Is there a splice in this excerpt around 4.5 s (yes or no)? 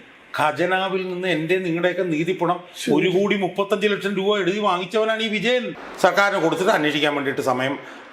no